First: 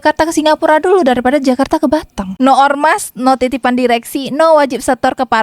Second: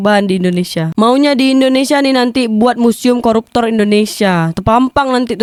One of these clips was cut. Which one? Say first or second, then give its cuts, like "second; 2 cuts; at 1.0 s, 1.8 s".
first; 1 cut; at 2.3 s